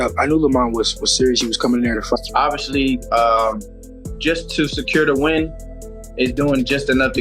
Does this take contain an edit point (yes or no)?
yes